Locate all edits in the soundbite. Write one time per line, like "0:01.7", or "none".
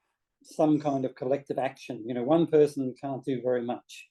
none